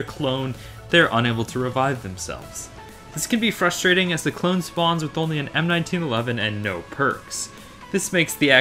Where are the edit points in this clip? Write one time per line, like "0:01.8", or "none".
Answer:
0:06.6